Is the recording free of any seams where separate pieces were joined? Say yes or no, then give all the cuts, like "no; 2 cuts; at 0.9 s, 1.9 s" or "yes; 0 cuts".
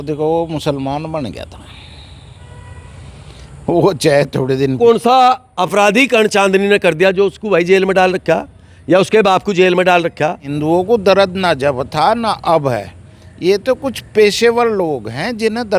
no; 2 cuts; at 4.8 s, 10.5 s